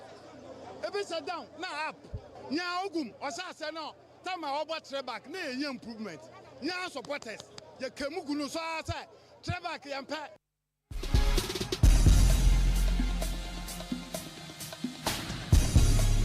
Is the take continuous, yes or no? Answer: no